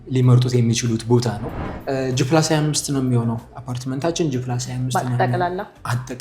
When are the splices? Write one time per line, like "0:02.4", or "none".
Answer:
0:01.7